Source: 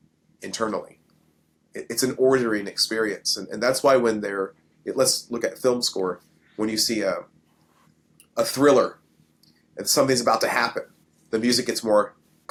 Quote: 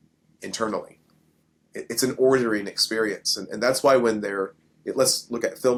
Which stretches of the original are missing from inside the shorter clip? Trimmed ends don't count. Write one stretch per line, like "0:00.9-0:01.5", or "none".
none